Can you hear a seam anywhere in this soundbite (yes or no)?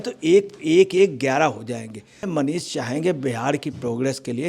yes